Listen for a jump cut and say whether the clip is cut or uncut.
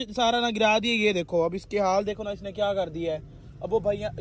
uncut